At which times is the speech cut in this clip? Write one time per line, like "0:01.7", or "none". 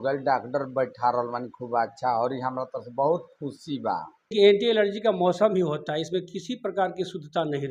0:04.3